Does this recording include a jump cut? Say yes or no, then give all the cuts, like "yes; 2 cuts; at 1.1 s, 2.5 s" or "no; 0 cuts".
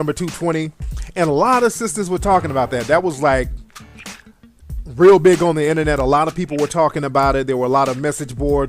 yes; 1 cut; at 1.3 s